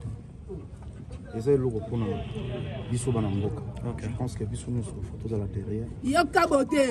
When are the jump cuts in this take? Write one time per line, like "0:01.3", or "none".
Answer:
none